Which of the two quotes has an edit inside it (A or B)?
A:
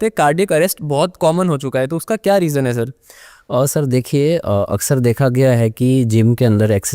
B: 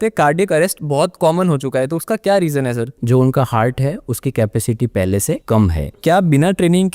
B